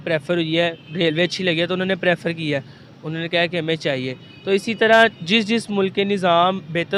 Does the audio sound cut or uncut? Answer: uncut